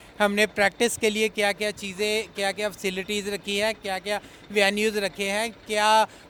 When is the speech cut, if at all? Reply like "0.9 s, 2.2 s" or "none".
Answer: none